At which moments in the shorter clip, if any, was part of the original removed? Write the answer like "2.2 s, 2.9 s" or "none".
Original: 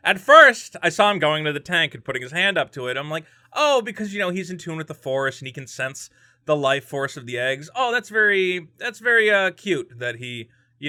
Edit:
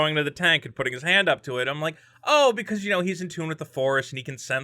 none